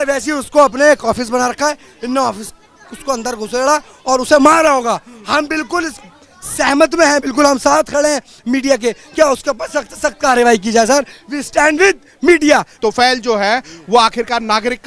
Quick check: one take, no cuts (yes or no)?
yes